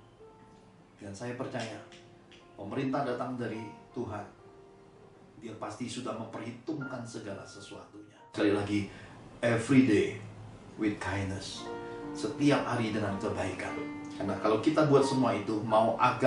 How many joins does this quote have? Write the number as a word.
one